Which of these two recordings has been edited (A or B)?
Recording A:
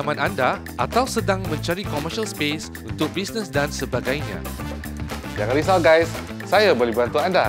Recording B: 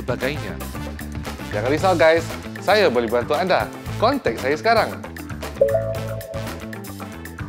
B